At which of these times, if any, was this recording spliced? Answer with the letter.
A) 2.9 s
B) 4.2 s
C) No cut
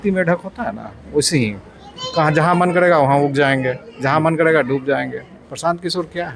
C